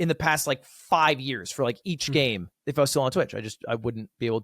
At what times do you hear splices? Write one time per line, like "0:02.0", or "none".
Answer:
0:02.5

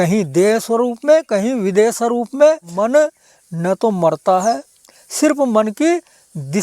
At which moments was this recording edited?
0:02.7

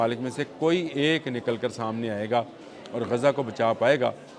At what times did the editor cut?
none

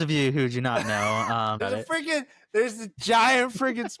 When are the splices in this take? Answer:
0:01.6

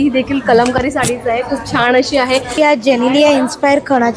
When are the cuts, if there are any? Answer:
0:02.6

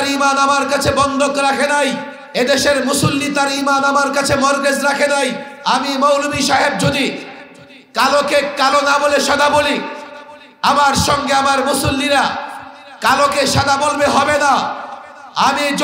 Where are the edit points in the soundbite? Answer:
0:02.1
0:05.5

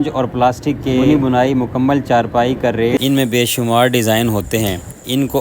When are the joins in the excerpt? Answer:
0:03.0

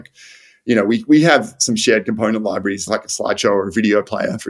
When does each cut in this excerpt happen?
0:02.8

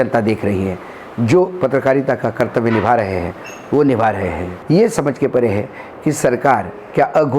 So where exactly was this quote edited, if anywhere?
0:04.5

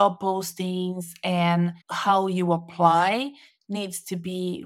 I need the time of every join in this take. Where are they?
0:01.9

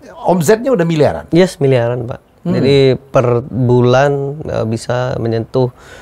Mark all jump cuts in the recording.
none

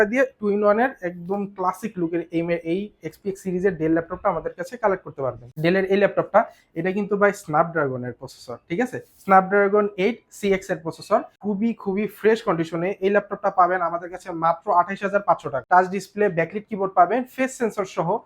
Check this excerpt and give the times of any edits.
0:05.4
0:11.3
0:15.5

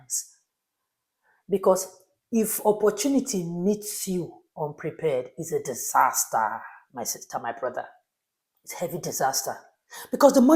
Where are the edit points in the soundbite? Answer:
none

